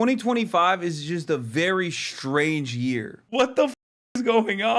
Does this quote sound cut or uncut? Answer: cut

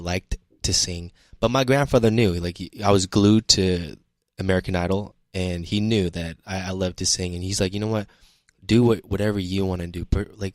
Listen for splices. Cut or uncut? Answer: uncut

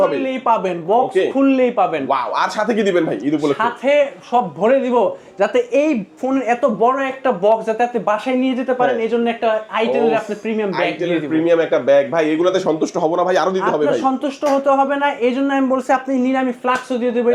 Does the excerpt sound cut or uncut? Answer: uncut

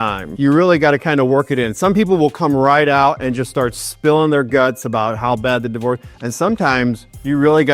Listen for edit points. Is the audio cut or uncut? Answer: cut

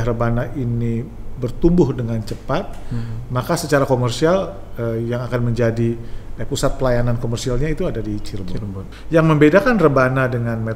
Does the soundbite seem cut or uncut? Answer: cut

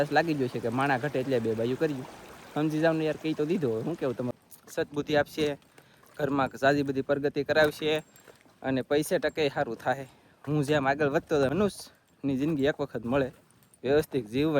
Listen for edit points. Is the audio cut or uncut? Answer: cut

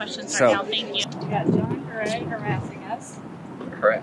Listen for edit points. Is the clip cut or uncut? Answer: cut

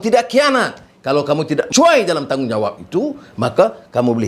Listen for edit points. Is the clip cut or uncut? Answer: cut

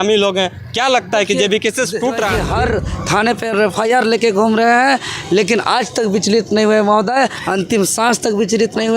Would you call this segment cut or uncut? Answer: cut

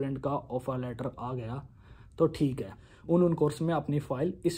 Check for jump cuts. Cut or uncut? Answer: cut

